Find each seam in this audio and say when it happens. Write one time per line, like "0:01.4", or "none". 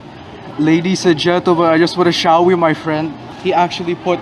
0:03.3

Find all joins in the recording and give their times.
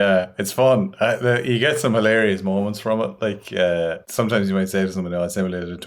0:04.0

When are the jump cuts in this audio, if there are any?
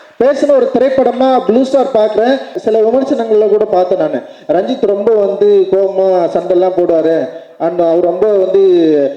0:02.5

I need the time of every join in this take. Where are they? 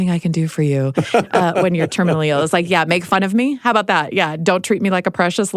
none

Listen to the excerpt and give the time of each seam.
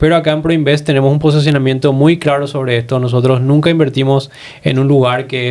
none

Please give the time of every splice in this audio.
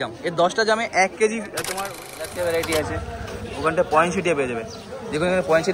0:01.6

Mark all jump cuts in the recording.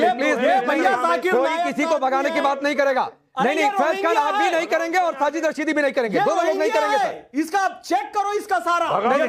none

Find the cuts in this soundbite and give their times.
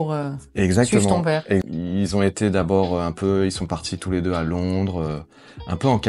0:01.6

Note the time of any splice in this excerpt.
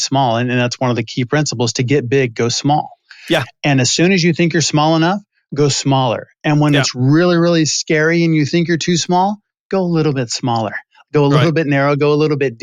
none

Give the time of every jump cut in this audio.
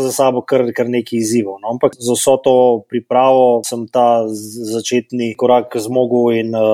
0:02.0
0:03.8

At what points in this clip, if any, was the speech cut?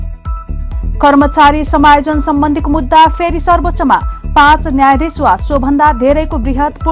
0:01.0

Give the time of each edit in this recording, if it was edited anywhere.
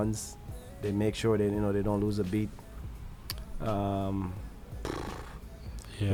none

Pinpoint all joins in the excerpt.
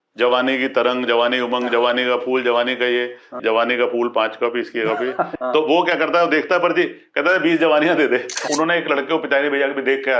0:03.4
0:05.3
0:08.4

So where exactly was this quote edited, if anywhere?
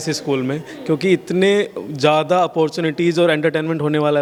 none

